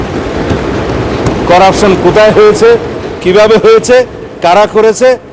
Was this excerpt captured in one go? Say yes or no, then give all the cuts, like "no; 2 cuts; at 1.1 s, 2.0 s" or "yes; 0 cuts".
yes; 0 cuts